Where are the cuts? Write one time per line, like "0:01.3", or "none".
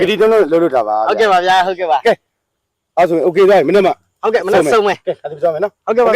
none